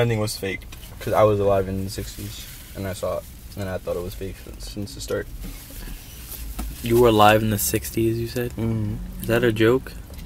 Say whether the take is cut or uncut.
cut